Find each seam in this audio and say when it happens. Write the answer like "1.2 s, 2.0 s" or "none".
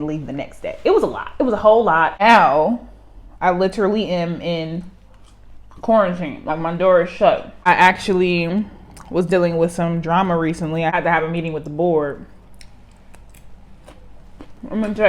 2.1 s, 7.6 s